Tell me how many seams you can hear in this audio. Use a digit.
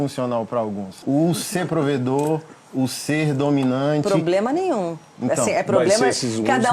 0